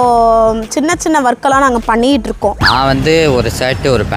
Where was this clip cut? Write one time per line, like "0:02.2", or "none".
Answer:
0:02.6